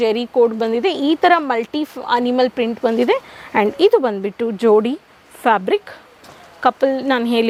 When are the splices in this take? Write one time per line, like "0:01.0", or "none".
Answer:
none